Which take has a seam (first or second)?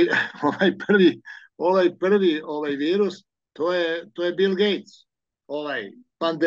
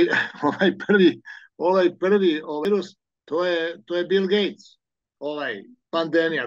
second